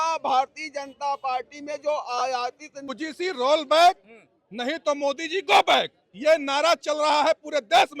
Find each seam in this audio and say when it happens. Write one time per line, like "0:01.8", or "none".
0:02.9